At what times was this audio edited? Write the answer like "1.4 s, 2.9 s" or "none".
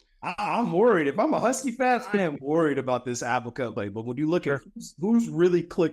3.7 s